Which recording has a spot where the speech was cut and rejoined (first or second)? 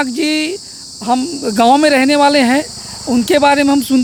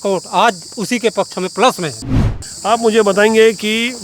second